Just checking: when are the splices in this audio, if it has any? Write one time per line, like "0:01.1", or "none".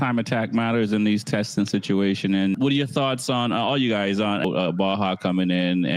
0:02.6
0:04.4